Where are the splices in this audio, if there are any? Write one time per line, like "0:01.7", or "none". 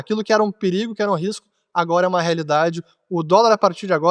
none

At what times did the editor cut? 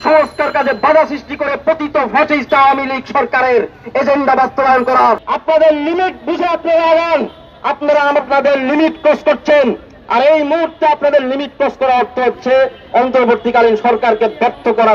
0:05.2

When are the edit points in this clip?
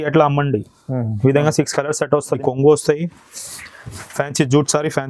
0:02.4

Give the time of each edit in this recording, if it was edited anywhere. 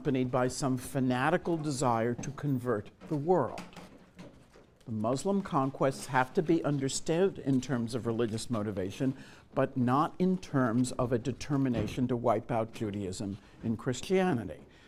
none

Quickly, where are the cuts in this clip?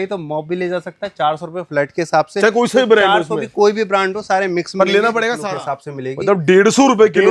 0:05.4

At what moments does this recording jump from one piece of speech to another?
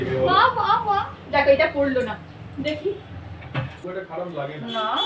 0:03.8

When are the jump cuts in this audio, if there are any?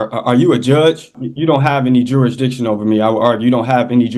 0:01.2

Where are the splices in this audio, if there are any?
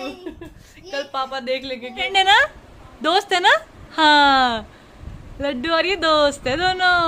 0:02.1

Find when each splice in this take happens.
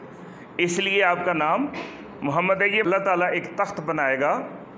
0:02.8

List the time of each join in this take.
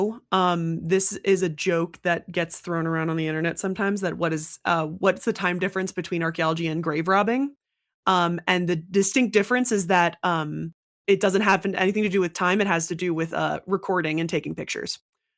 none

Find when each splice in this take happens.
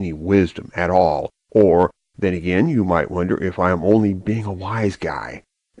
0:01.0

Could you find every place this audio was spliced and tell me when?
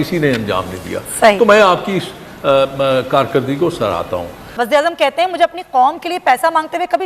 0:04.4

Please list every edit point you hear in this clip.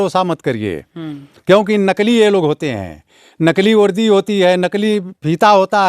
none

